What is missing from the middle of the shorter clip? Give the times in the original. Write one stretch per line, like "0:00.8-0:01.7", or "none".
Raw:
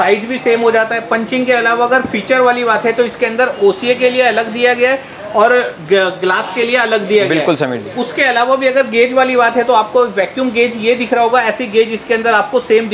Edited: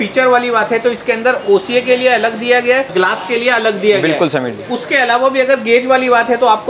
0:05.0-0:06.1